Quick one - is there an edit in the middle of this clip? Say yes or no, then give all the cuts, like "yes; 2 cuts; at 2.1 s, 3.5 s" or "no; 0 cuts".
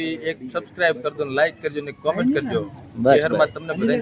no; 0 cuts